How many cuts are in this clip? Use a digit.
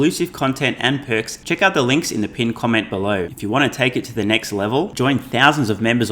2